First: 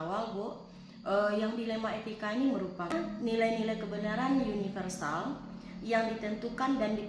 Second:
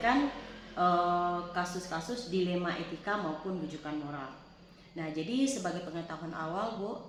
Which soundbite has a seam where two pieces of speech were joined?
first; 1 cut; at 3.0 s

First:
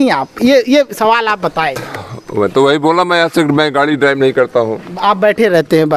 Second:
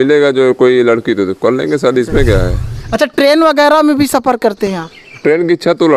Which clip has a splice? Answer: second; 1 cut; at 2.7 s

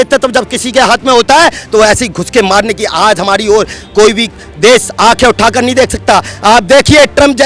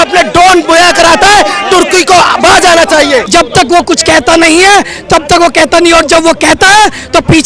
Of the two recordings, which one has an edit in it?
second; 1 cut; at 3.3 s

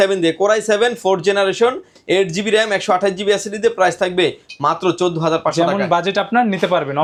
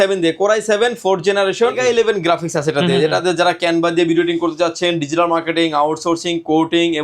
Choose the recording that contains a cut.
second; 1 cut; at 1.8 s

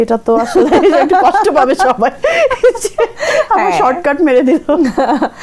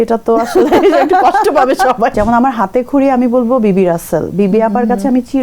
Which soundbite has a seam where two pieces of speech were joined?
second; 1 cut; at 2.1 s

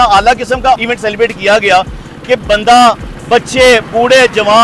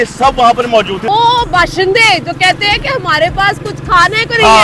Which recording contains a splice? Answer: second; 1 cut; at 1.0 s

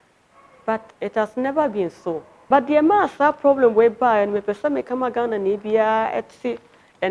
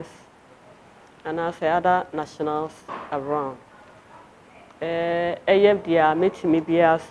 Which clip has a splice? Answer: first; 2 cuts; at 0.9 s, 2.3 s

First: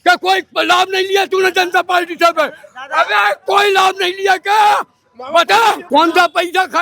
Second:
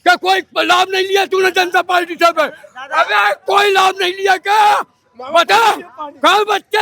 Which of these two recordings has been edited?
first; 1 cut; at 5.8 s

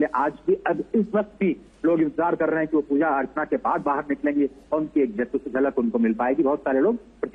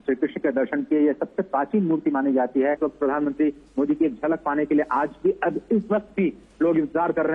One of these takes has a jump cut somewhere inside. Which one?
second; 1 cut; at 2.8 s

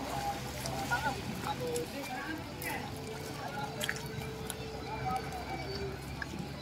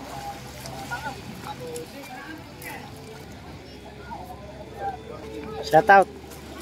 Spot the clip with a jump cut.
second; 2 cuts; at 3.2 s, 5.2 s

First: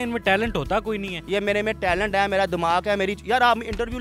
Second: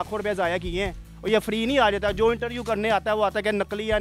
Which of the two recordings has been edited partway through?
first; 1 cut; at 1.2 s

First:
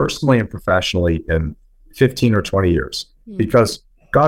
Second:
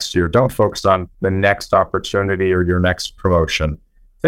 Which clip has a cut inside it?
second; 1 cut; at 1.1 s

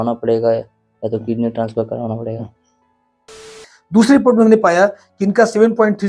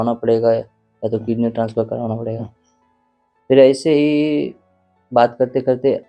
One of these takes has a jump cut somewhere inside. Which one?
first; 1 cut; at 3.5 s

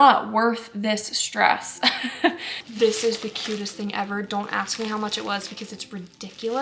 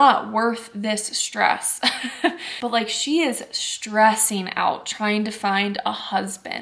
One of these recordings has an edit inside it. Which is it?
first; 1 cut; at 2.5 s

